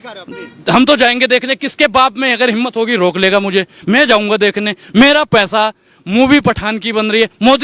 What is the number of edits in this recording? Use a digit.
0